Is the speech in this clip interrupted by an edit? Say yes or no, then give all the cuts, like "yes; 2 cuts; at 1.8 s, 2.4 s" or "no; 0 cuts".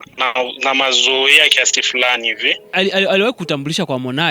yes; 1 cut; at 2.7 s